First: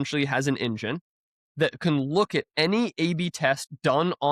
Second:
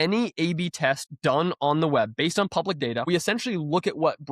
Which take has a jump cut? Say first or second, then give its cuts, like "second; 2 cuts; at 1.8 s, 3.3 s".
second; 1 cut; at 3.1 s